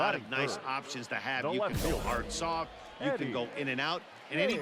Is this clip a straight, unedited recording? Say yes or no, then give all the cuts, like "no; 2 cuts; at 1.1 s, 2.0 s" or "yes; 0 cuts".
yes; 0 cuts